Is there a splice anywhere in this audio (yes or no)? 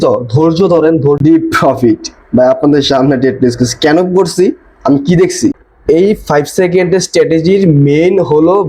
yes